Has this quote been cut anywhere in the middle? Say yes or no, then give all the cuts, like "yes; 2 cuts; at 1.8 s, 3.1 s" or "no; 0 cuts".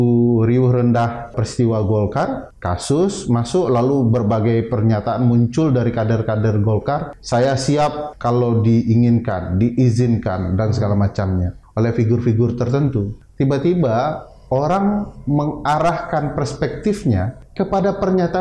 yes; 7 cuts; at 1.4 s, 2.5 s, 7.1 s, 8.1 s, 11.6 s, 13.2 s, 17.4 s